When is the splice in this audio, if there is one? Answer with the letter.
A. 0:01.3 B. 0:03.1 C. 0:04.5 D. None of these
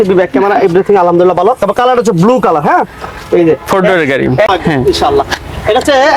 C